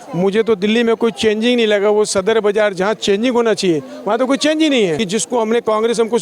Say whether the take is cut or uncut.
cut